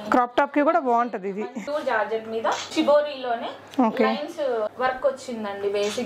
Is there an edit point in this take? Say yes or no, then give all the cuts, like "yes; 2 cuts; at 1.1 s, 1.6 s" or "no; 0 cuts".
yes; 2 cuts; at 1.6 s, 2.6 s